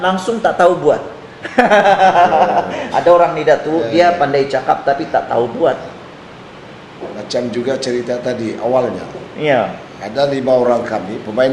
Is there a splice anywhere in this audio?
no; 0 cuts

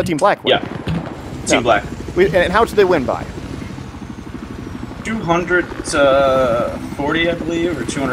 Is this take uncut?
no; 1 cut; at 3.0 s

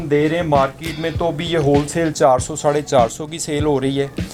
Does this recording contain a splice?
no; 0 cuts

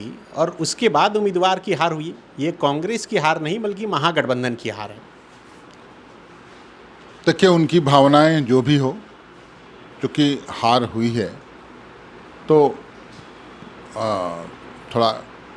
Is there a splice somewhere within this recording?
no; 0 cuts

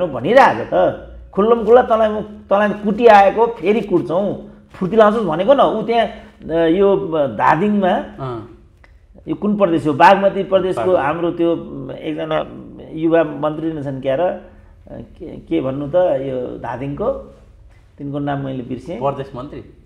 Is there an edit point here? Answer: no; 0 cuts

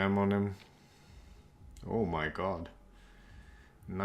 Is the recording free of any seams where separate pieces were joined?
yes; 0 cuts

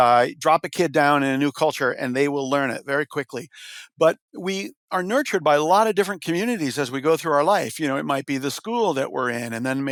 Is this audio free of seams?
yes; 0 cuts

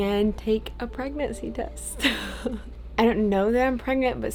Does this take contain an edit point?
no; 0 cuts

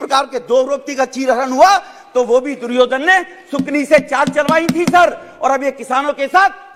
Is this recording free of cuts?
yes; 0 cuts

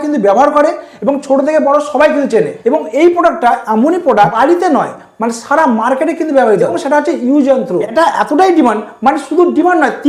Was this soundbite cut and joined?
yes; 4 cuts; at 2.5 s, 4.4 s, 6.8 s, 7.9 s

